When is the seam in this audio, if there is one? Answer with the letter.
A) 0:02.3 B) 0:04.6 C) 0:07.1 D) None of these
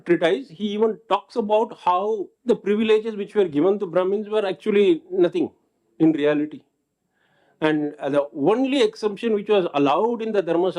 A